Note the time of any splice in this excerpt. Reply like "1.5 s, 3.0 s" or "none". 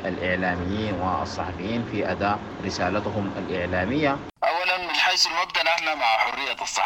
2.5 s, 4.3 s